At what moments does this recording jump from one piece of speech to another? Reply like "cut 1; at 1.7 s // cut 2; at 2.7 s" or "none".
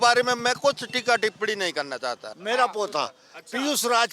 cut 1; at 2.3 s